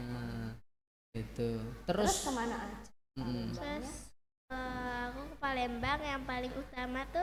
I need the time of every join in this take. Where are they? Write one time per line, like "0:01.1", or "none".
none